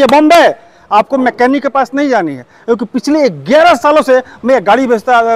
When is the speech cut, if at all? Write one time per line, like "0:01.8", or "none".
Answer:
none